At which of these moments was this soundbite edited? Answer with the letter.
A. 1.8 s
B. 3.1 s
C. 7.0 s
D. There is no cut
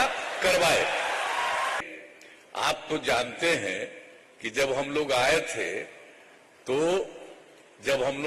A